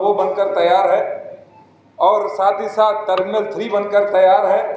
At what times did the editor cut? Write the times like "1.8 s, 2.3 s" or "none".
none